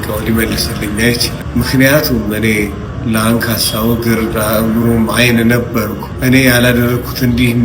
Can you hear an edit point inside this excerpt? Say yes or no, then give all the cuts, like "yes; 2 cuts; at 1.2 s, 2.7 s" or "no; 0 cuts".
yes; 3 cuts; at 1.4 s, 2.9 s, 6.0 s